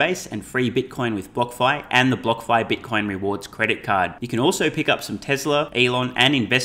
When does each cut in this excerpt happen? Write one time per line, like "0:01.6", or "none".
0:05.7